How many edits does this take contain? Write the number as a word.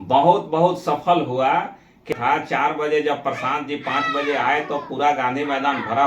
one